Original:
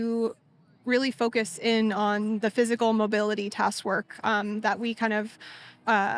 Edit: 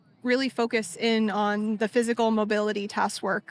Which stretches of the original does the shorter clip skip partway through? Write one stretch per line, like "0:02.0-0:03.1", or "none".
none